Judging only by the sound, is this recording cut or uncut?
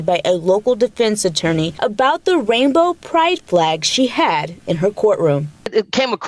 cut